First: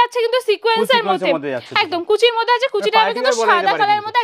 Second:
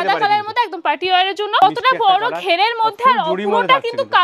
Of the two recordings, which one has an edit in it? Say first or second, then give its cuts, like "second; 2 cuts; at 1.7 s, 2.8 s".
second; 1 cut; at 1.6 s